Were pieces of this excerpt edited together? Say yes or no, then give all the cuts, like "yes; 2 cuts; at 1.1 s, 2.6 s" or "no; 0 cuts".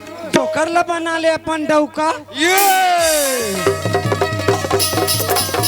no; 0 cuts